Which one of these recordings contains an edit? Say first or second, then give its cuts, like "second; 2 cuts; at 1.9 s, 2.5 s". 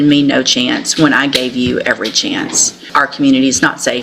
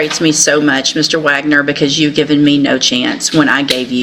first; 1 cut; at 2.9 s